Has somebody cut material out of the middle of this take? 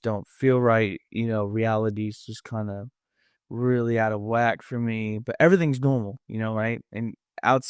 no; 0 cuts

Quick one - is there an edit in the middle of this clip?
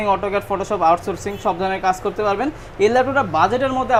no; 0 cuts

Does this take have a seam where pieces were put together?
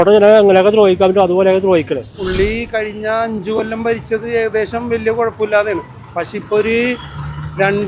yes; 1 cut; at 2.2 s

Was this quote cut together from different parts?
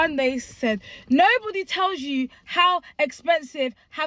no; 0 cuts

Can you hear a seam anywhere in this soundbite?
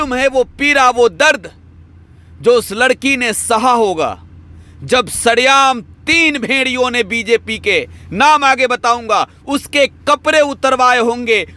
no; 0 cuts

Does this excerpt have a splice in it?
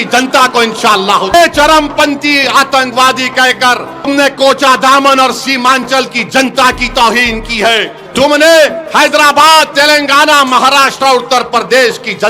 yes; 3 cuts; at 1.3 s, 4.1 s, 8.0 s

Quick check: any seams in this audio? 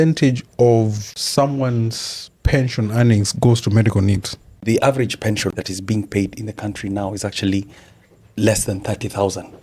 yes; 1 cut; at 4.6 s

